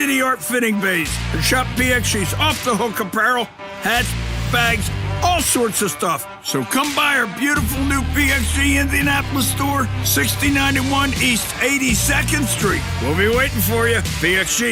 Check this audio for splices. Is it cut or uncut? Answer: uncut